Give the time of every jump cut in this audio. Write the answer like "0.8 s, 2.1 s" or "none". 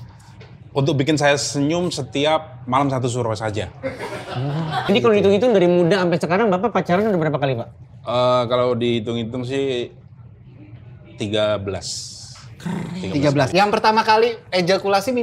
4.8 s, 13.5 s